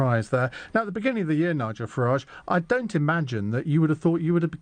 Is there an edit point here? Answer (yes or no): no